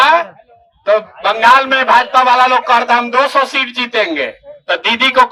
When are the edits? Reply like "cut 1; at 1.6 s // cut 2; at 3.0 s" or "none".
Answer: none